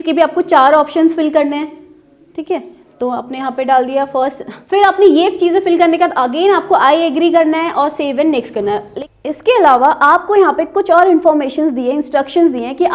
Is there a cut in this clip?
yes; 2 cuts; at 4.5 s, 8.9 s

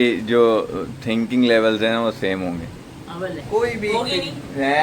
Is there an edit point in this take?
yes; 1 cut; at 3.4 s

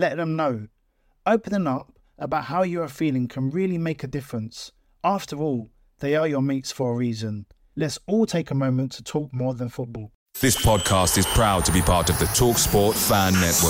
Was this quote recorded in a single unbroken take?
no; 1 cut; at 10.2 s

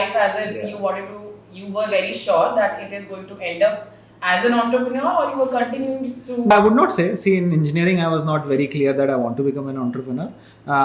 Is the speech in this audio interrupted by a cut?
yes; 1 cut; at 6.5 s

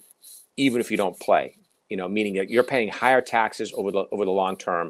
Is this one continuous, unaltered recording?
yes; 0 cuts

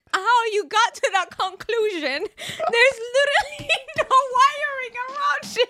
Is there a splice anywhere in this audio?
no; 0 cuts

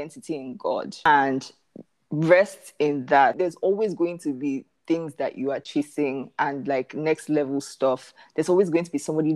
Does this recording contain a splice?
yes; 1 cut; at 1.0 s

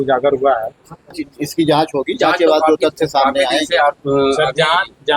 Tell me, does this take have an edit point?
yes; 1 cut; at 1.2 s

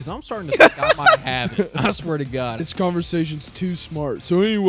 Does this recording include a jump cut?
yes; 1 cut; at 2.6 s

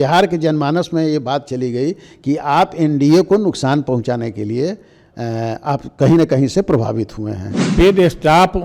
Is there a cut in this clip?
yes; 1 cut; at 7.7 s

